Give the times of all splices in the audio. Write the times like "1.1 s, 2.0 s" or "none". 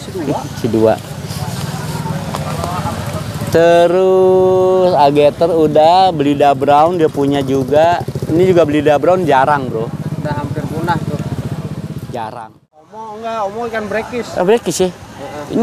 13.0 s